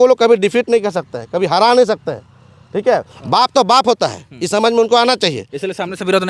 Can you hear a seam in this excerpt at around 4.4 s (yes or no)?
no